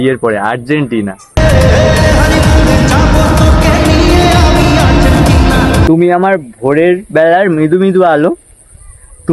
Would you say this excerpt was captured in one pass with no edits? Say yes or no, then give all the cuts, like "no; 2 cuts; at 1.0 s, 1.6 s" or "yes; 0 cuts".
no; 1 cut; at 5.8 s